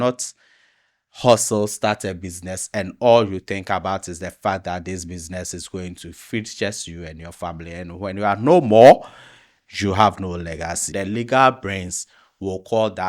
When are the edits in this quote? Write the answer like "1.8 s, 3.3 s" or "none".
10.9 s